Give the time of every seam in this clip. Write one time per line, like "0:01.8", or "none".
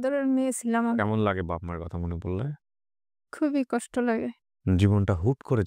0:01.0